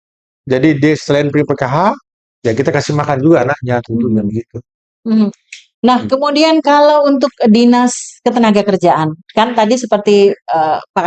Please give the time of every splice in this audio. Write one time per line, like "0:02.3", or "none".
none